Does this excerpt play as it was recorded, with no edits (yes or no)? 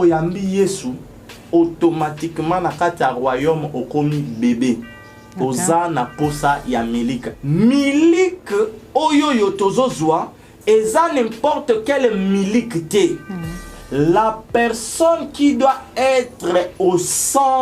no